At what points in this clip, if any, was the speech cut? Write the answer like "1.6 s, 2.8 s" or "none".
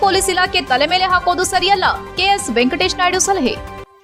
none